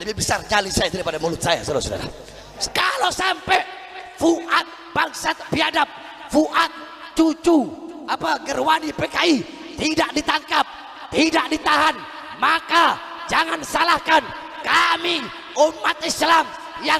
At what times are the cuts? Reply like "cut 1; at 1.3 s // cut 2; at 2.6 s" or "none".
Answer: cut 1; at 2.4 s